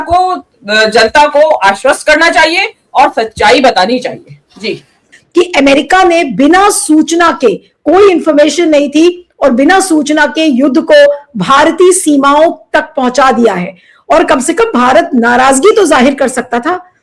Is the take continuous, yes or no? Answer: yes